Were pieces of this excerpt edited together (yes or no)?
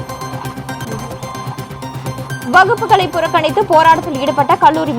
no